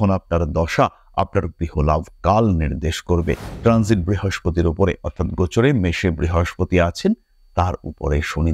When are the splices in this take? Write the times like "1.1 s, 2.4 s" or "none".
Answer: 3.5 s